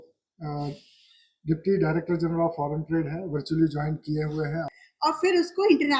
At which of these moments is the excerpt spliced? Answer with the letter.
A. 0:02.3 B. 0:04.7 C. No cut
B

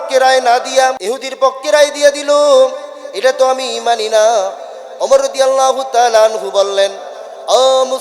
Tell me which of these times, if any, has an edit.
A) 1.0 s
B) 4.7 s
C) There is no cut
A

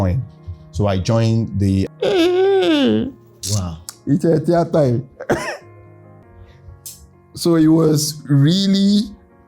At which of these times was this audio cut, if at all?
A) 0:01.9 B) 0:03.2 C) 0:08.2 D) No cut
A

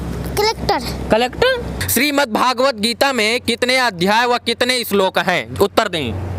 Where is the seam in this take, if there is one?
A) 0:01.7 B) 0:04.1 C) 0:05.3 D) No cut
A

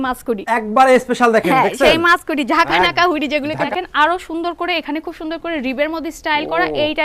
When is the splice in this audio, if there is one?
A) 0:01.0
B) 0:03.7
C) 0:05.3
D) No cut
B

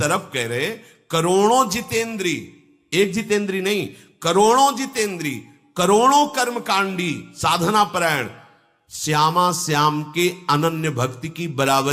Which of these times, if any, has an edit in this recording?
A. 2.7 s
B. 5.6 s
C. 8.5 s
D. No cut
D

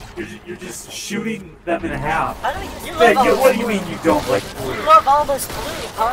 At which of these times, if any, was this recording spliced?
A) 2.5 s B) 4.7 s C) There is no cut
A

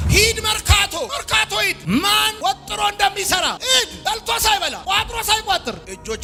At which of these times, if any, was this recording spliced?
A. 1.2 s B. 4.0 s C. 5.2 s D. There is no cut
D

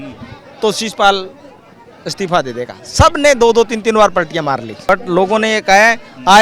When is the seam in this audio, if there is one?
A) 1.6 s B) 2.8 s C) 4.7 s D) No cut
C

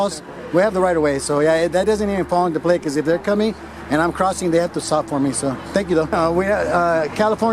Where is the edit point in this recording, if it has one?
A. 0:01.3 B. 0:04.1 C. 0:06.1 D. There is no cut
C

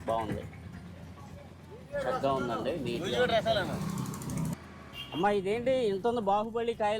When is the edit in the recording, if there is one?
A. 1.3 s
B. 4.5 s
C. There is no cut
B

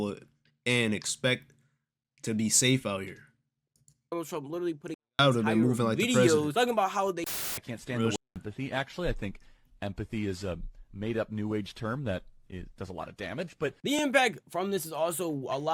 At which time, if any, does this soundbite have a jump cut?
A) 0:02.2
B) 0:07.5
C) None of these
B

